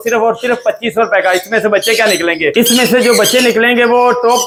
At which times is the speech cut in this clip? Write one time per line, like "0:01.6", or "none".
none